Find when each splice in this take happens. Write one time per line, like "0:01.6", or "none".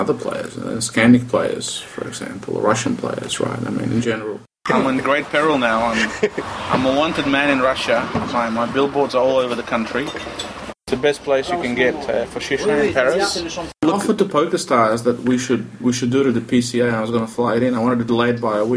0:04.6
0:10.7
0:13.8